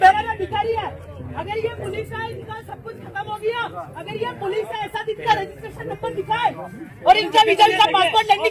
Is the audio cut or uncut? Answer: uncut